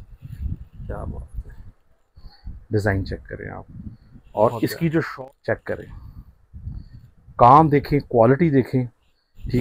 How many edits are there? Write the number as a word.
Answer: one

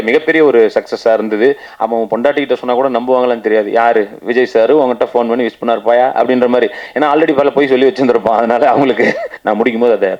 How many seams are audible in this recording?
two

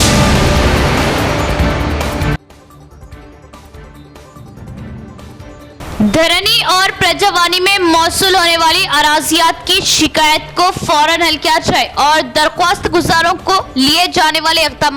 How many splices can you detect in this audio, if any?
one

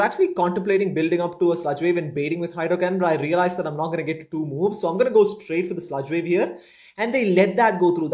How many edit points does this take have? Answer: zero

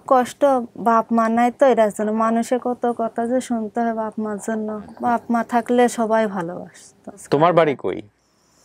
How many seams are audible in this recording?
two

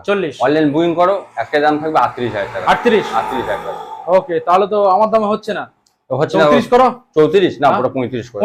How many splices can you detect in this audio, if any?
zero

